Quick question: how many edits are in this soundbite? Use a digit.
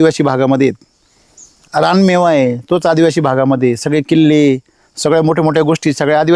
1